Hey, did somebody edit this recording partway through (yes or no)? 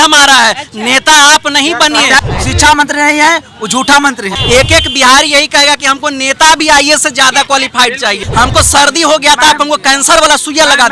yes